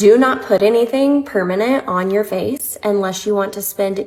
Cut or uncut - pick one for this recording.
uncut